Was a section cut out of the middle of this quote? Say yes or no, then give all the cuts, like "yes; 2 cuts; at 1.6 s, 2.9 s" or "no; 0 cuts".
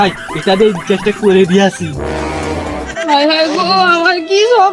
yes; 1 cut; at 2.8 s